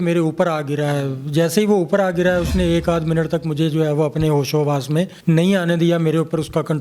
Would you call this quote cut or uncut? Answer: uncut